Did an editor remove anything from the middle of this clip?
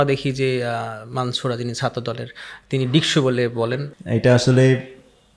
yes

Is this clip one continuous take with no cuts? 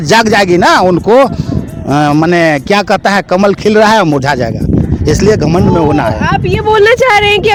yes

